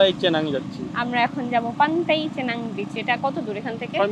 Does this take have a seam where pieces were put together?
no; 0 cuts

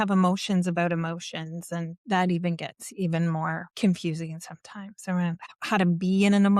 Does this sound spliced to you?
yes; 3 cuts; at 2.0 s, 3.6 s, 5.5 s

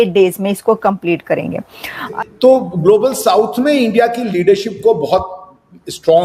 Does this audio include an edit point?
yes; 1 cut; at 2.1 s

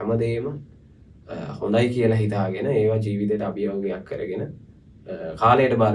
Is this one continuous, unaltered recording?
yes; 0 cuts

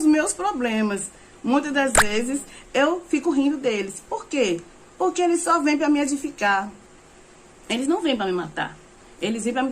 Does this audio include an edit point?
no; 0 cuts

